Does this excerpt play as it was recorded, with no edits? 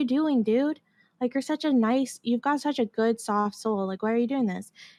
yes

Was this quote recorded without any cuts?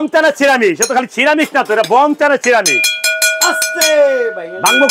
yes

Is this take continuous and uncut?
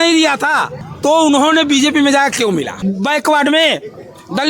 no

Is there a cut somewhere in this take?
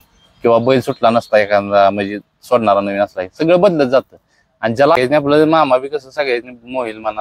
yes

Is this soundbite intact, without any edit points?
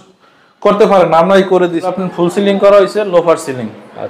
no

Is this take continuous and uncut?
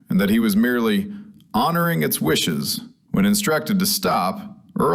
no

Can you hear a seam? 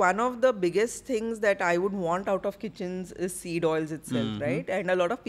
no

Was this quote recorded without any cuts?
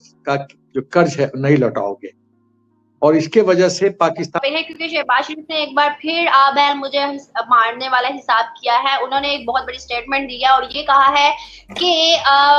no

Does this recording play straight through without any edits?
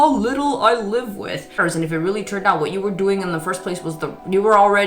no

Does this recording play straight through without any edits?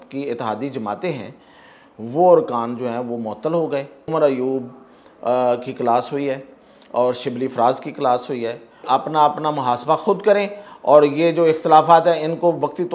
no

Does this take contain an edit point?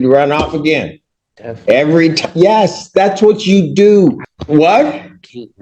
yes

